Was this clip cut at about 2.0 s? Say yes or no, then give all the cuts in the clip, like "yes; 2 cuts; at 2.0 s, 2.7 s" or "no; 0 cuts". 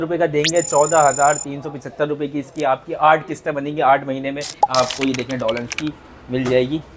no; 1 cut; at 4.5 s